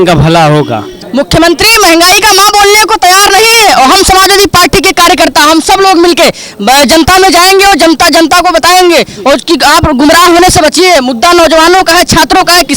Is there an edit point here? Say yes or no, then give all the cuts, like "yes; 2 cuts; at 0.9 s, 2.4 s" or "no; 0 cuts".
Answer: yes; 1 cut; at 1.0 s